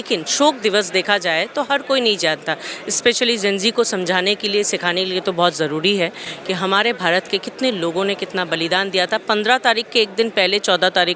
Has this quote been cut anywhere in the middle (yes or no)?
no